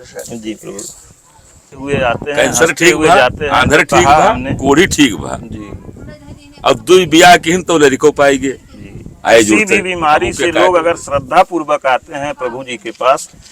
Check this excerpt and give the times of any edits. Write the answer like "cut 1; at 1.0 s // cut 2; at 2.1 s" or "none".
cut 1; at 1.8 s